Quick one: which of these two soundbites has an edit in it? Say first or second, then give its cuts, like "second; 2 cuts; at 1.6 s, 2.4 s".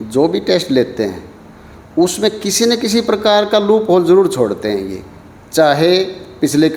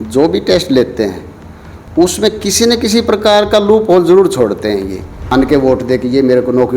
second; 1 cut; at 5.3 s